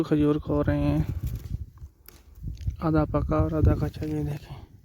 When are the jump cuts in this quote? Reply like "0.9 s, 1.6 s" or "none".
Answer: none